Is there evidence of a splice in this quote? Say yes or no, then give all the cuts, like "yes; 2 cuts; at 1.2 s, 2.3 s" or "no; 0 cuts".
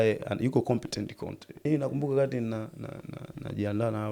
yes; 1 cut; at 1.6 s